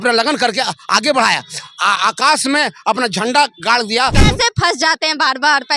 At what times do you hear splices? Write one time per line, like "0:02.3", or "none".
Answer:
0:04.2